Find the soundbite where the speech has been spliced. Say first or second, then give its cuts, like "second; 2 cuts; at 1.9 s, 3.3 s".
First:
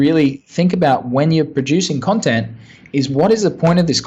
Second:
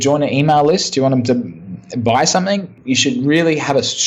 second; 1 cut; at 2.7 s